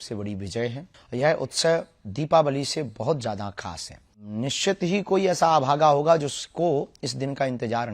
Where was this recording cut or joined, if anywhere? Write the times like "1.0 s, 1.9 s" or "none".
0.9 s, 4.3 s